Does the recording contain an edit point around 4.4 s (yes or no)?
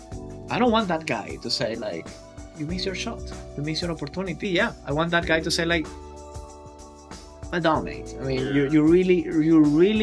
yes